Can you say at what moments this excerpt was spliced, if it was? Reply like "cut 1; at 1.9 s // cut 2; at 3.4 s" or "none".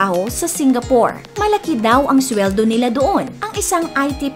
cut 1; at 1.3 s // cut 2; at 3.4 s